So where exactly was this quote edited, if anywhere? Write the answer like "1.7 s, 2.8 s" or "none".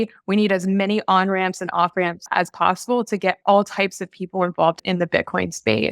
2.3 s, 4.8 s